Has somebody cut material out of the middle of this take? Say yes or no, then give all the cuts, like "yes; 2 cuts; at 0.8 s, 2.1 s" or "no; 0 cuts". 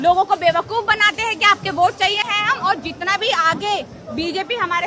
no; 0 cuts